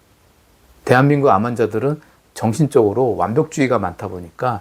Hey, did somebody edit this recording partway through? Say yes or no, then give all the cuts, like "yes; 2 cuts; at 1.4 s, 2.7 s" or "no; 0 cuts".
no; 0 cuts